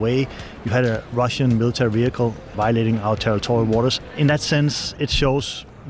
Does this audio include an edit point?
yes; 1 cut; at 4.1 s

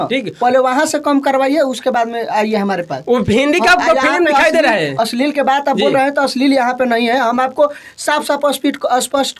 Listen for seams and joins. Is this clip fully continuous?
yes; 0 cuts

